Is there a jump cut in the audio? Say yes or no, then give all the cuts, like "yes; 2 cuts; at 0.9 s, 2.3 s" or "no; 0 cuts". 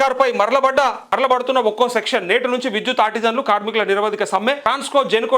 yes; 2 cuts; at 1.0 s, 4.6 s